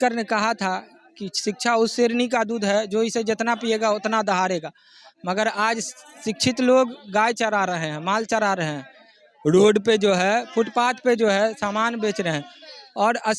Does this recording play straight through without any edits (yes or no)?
yes